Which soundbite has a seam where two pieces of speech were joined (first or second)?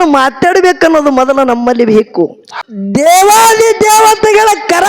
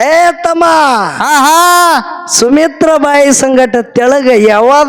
first